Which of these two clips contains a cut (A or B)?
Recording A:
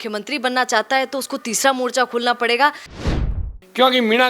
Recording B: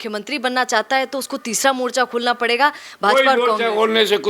A